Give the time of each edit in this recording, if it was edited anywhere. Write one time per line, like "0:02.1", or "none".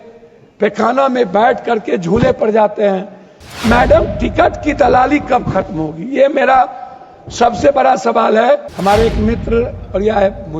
0:08.7